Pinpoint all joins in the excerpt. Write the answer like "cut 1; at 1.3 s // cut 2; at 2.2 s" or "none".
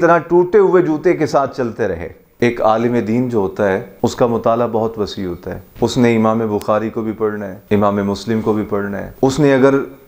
cut 1; at 2.2 s // cut 2; at 3.9 s // cut 3; at 9.0 s